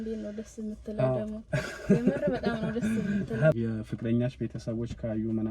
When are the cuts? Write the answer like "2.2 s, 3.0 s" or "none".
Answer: 3.5 s